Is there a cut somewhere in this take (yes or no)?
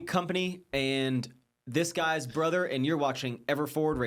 no